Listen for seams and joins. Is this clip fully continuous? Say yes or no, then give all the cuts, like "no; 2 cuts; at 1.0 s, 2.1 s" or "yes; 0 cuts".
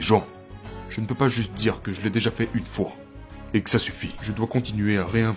yes; 0 cuts